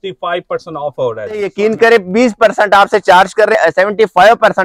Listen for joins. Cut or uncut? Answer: cut